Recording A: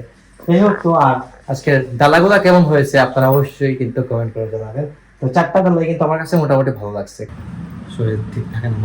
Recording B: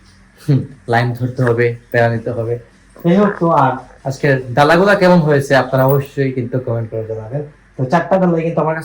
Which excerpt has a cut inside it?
A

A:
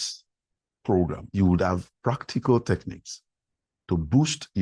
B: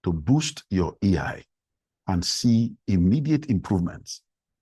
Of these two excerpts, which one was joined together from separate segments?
A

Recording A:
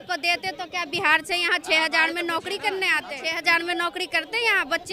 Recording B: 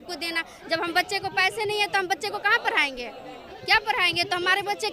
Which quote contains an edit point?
A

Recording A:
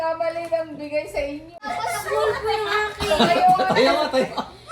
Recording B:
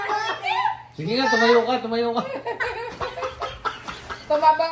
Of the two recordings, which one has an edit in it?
A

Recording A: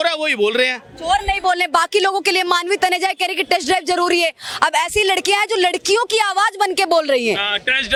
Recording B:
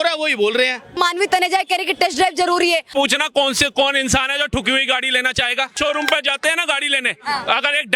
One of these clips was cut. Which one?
B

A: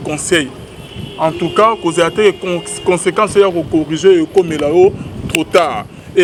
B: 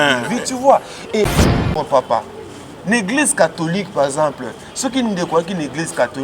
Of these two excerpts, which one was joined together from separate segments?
B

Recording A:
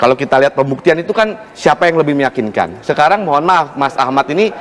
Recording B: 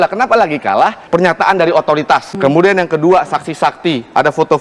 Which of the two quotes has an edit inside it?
B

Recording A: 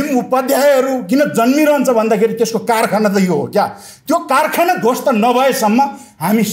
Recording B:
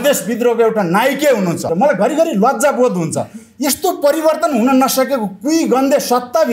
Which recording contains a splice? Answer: B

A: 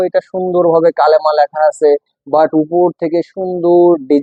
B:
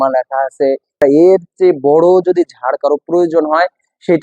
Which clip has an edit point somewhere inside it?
B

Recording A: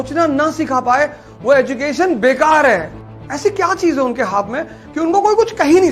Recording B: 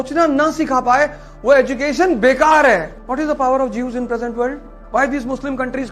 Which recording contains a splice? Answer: A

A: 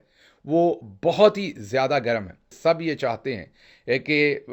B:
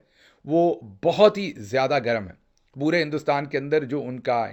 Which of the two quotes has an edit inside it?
A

